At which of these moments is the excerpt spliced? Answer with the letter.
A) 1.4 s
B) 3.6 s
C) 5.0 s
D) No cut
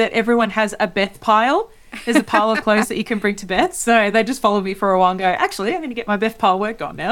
D